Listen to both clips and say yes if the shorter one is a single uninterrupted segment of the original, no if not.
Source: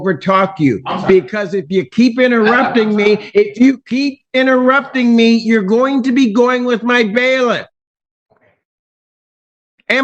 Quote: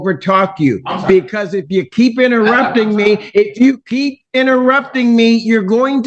yes